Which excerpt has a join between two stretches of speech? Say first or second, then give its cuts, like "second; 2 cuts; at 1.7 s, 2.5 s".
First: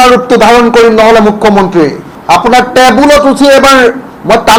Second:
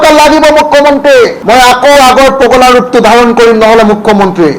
second; 1 cut; at 1.4 s